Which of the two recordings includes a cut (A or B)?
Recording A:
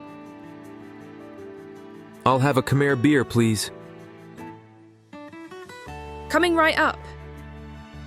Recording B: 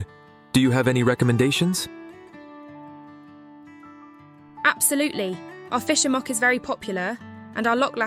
A